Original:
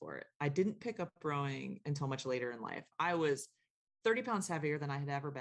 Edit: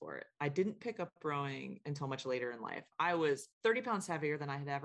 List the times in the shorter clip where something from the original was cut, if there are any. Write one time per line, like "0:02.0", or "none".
0:03.5